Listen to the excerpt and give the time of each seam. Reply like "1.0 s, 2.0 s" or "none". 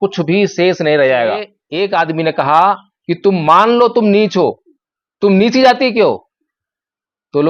1.6 s